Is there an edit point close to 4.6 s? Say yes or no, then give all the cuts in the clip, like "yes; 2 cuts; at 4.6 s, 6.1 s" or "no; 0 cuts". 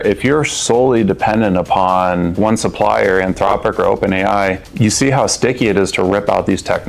yes; 2 cuts; at 2.3 s, 4.6 s